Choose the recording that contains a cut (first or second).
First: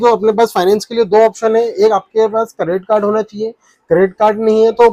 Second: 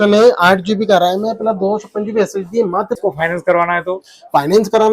second